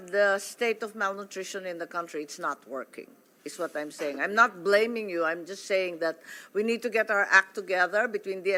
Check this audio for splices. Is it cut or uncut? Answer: uncut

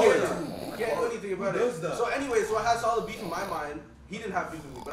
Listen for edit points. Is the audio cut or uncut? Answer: uncut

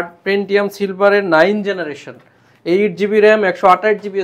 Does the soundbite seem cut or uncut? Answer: uncut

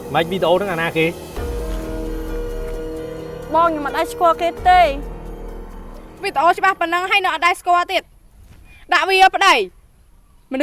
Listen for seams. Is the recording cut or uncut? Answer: cut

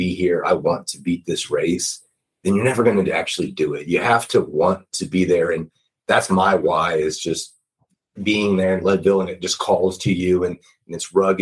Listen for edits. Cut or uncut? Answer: uncut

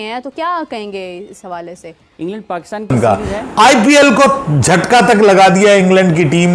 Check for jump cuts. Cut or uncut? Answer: cut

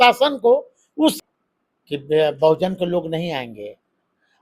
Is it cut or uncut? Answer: cut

